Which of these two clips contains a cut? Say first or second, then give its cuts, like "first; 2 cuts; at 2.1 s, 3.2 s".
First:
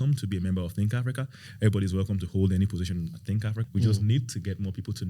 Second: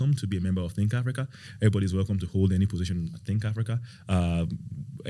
first; 1 cut; at 3.6 s